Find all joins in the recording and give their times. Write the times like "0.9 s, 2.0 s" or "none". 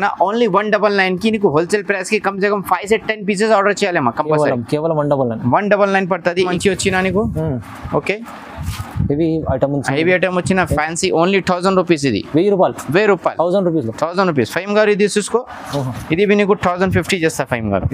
6.5 s